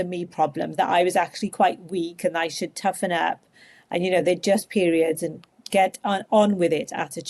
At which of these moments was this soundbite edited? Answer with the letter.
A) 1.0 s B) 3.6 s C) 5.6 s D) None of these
C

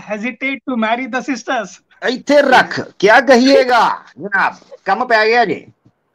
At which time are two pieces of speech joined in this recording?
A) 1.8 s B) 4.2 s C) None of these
A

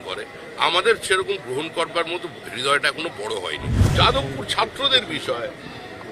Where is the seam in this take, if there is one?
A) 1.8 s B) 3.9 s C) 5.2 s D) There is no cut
B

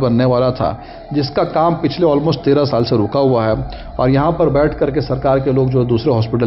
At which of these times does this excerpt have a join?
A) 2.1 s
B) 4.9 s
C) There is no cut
C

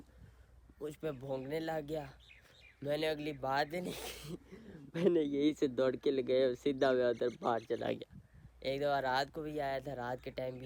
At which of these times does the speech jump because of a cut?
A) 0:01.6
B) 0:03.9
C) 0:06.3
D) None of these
D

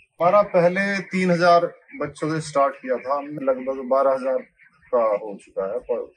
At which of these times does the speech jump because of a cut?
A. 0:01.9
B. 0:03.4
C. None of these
B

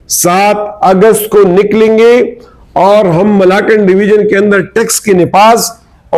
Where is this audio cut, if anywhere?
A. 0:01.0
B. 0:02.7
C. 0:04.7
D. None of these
D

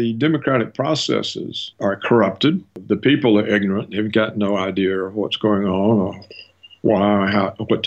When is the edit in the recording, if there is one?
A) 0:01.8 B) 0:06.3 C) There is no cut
C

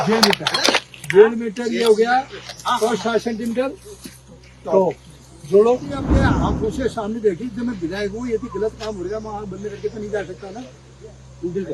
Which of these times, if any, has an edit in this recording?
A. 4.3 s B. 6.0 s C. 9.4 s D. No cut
B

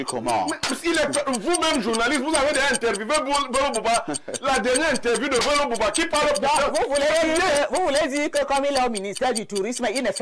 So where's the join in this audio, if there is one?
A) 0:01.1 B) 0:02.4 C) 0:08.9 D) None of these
D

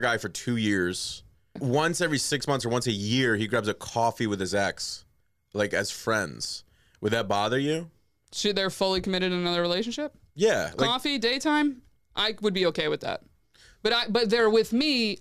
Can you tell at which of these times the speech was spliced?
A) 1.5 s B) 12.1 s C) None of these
A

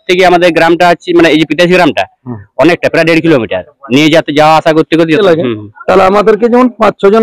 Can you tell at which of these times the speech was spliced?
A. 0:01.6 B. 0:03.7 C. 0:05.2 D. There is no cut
C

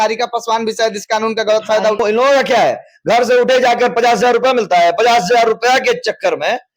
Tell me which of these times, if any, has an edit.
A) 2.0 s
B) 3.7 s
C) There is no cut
A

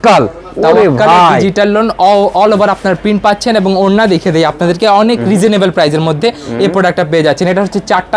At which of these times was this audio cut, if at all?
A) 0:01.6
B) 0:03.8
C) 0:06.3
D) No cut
D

